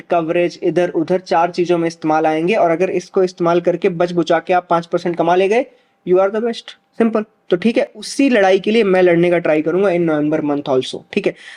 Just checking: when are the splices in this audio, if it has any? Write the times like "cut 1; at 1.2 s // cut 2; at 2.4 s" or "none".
none